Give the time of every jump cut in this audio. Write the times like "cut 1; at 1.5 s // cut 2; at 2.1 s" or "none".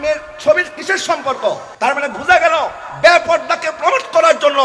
cut 1; at 1.7 s